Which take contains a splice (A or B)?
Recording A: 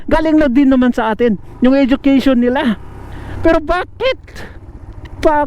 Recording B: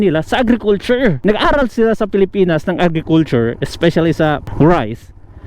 B